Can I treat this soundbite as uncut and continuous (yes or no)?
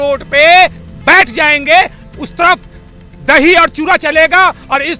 yes